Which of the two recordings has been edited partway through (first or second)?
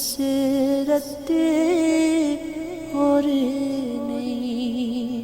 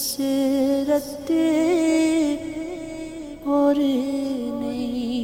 first